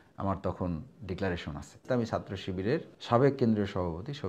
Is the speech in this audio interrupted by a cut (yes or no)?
yes